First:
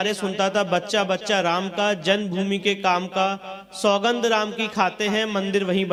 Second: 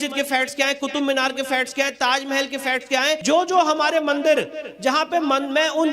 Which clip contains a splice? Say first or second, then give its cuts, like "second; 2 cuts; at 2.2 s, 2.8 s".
second; 1 cut; at 3.2 s